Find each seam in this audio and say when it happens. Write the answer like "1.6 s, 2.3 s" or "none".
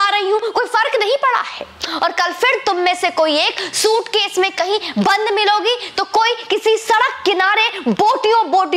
none